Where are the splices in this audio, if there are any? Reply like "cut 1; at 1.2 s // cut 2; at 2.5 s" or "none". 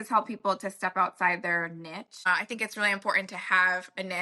cut 1; at 2.3 s